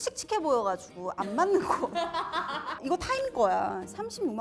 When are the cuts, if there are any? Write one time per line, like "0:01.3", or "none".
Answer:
none